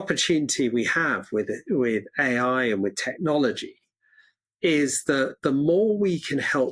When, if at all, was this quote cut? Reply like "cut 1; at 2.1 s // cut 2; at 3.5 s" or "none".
none